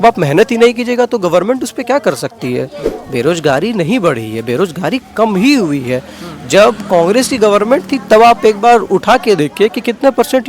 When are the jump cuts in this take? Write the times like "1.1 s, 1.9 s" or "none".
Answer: 2.8 s